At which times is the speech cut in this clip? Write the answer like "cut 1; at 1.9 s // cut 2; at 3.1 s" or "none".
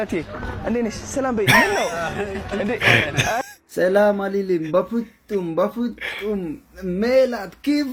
none